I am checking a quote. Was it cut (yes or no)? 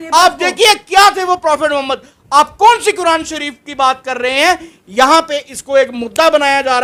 no